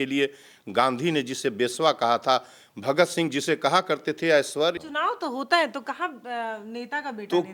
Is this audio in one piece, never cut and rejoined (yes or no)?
no